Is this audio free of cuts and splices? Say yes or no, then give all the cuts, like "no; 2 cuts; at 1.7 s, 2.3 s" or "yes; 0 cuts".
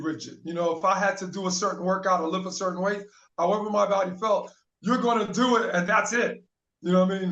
yes; 0 cuts